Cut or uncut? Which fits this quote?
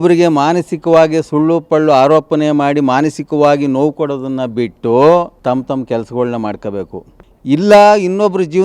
cut